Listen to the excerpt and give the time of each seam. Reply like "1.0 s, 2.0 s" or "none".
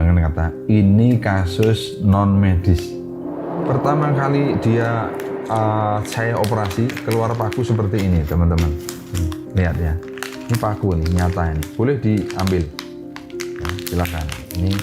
3.0 s